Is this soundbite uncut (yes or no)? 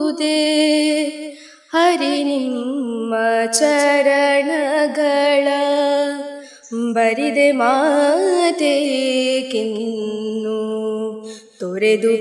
yes